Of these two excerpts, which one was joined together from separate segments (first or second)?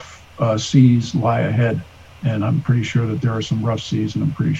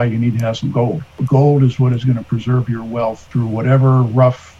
second